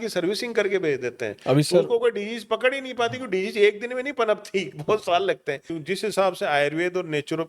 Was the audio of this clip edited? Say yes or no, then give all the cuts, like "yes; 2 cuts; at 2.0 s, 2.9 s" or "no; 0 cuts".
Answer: yes; 1 cut; at 5.7 s